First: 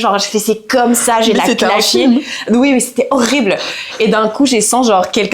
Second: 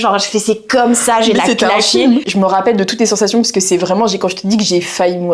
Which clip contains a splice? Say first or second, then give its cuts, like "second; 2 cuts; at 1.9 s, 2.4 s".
second; 1 cut; at 2.3 s